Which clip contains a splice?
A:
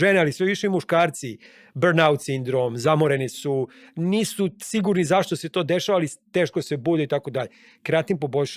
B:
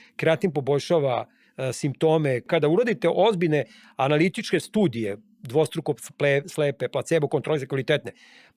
B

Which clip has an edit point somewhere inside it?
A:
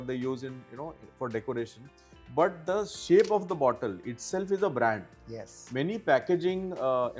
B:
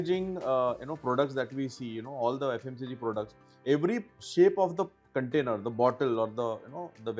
B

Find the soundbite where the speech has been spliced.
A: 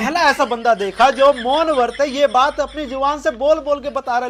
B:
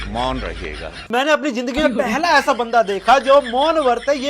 B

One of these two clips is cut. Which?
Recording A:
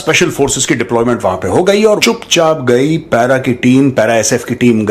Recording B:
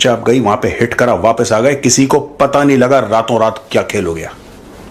A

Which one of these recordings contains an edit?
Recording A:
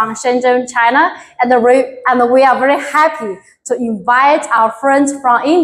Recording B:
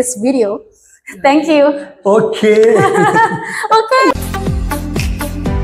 B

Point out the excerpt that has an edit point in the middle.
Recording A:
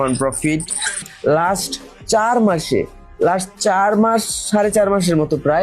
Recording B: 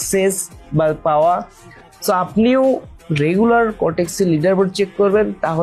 A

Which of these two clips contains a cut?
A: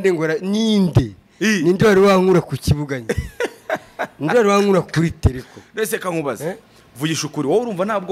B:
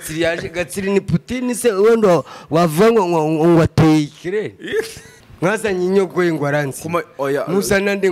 B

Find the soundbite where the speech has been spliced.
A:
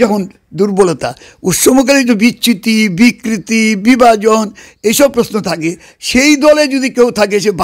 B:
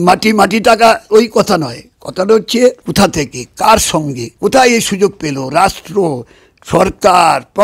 B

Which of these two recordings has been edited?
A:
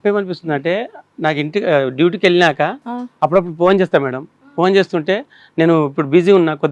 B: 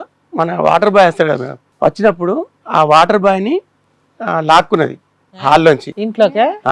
B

